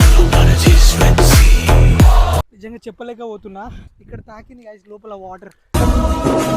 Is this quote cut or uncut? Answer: cut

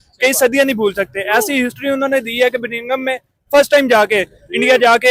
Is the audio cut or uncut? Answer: uncut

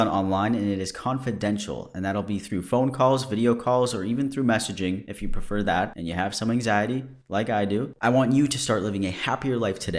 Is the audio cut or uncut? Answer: cut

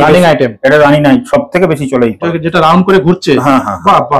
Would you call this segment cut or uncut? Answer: cut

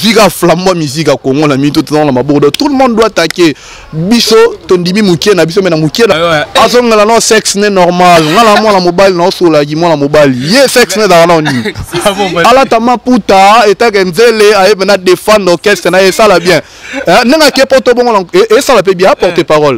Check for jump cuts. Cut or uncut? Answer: cut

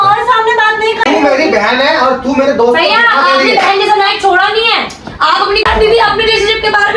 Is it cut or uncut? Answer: cut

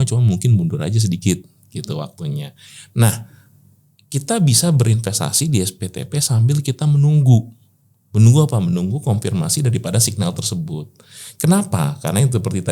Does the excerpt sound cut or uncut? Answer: uncut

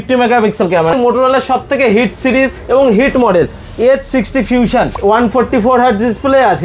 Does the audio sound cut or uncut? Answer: cut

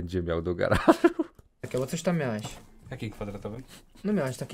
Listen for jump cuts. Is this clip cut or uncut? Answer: uncut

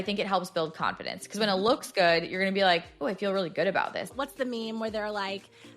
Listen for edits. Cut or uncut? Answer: cut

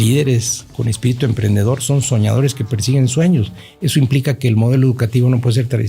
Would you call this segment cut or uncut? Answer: uncut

